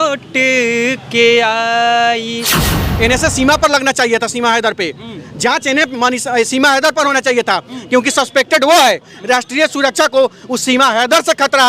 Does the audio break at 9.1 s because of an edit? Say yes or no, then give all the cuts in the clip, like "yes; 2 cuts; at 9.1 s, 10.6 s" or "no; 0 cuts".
yes; 2 cuts; at 2.7 s, 9.1 s